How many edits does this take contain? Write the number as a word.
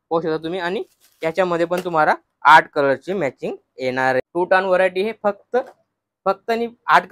one